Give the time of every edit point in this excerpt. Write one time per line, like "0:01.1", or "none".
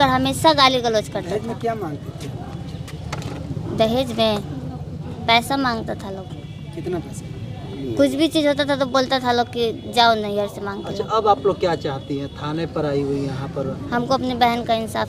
none